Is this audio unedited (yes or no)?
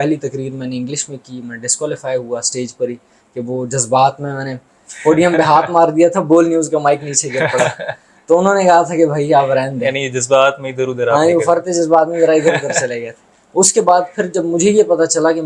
yes